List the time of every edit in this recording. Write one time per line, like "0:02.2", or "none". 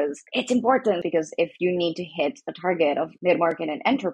0:01.0
0:03.1